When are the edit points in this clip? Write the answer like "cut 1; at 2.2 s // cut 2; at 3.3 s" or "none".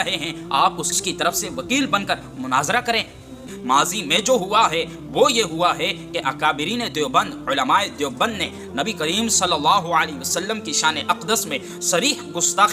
cut 1; at 3.5 s